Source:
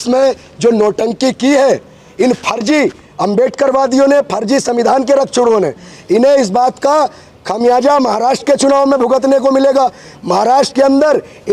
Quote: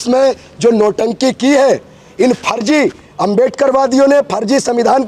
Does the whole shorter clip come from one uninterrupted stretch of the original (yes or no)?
yes